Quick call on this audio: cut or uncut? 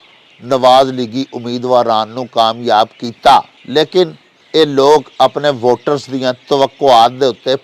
cut